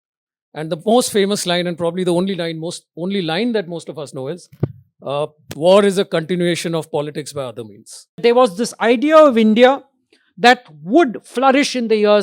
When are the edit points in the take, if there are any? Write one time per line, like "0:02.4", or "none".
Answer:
0:08.2